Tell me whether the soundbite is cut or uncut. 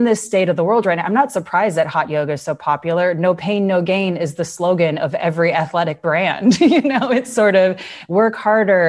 uncut